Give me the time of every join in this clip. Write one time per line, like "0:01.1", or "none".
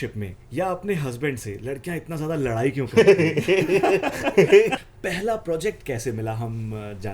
0:04.7